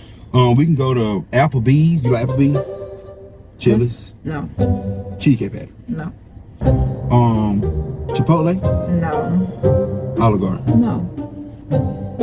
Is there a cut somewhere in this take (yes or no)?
no